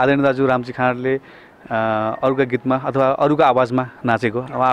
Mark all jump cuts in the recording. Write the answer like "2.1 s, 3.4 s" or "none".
none